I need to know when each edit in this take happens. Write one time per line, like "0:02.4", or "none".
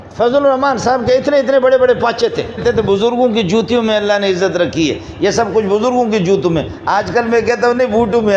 0:02.6